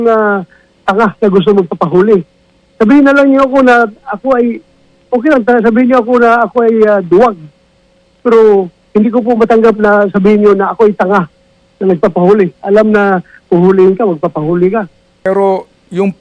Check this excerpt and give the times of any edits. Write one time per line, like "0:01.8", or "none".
0:15.1